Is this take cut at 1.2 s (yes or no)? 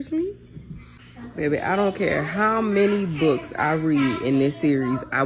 yes